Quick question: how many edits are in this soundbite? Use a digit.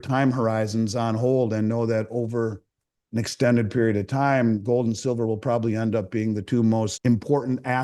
1